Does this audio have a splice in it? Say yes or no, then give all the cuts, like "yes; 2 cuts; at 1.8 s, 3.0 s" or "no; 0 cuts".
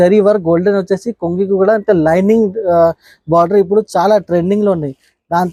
no; 0 cuts